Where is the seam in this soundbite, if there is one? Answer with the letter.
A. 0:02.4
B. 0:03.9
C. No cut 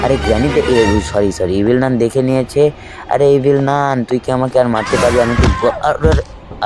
C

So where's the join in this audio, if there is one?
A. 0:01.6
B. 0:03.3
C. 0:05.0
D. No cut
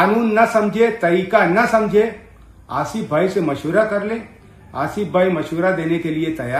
D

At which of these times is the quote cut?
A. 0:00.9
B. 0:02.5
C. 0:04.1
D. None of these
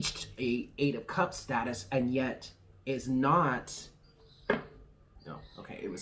D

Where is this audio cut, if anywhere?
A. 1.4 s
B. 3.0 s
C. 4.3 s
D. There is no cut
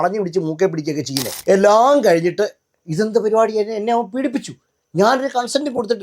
A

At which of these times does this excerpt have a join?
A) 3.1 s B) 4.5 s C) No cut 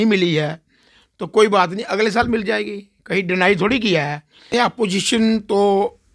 B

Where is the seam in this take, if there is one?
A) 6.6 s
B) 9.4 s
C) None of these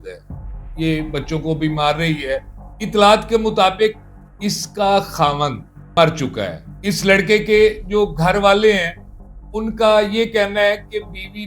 A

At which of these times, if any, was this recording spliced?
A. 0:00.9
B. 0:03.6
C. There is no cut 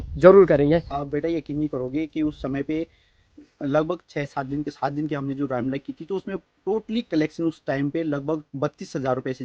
A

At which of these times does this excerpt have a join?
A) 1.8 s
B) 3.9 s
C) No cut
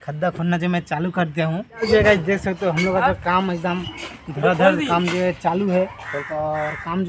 A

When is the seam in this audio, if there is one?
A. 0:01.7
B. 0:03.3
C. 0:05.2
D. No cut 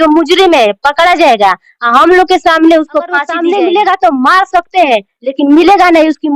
B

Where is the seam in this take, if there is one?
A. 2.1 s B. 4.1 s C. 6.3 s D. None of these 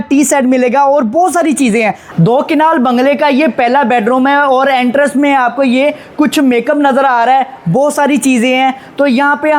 A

